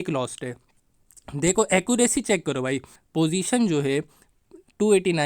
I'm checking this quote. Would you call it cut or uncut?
cut